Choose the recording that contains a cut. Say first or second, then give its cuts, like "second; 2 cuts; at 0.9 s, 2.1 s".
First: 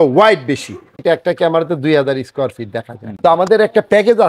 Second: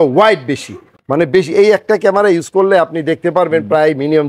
first; 2 cuts; at 1.0 s, 3.0 s